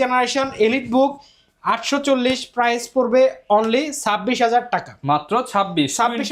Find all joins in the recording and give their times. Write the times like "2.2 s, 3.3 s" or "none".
none